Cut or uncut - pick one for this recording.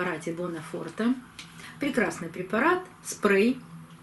cut